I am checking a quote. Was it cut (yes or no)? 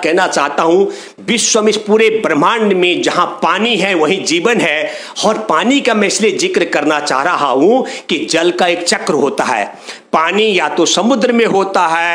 no